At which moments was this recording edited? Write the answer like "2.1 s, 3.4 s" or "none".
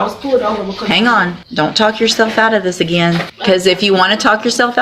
1.4 s, 3.3 s